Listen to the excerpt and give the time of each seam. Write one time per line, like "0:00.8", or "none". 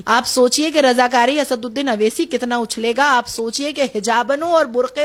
none